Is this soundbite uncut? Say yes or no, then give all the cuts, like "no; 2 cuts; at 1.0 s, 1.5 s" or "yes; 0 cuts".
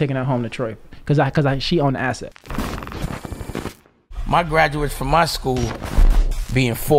no; 1 cut; at 2.4 s